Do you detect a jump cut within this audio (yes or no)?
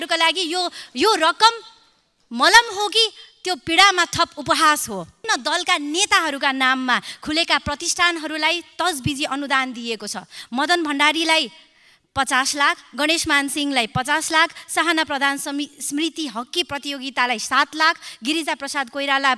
yes